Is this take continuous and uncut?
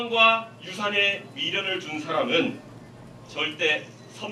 yes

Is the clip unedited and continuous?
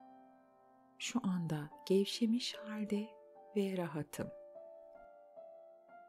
no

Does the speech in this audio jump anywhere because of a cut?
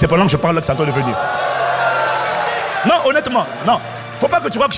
no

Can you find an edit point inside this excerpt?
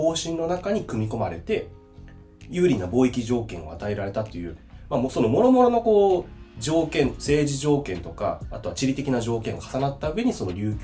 no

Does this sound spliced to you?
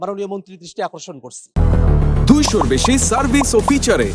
yes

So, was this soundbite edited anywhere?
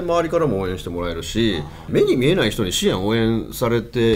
yes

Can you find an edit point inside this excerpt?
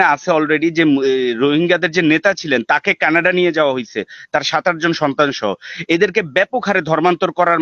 no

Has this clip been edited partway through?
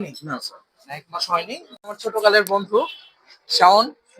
yes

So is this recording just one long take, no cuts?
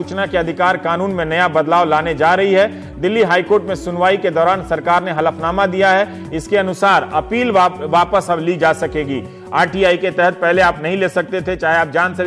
no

